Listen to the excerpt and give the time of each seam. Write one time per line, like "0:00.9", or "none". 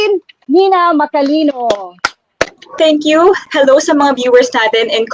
0:02.7